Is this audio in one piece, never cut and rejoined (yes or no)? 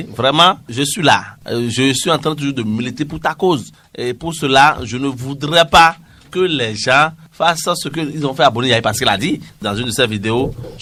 yes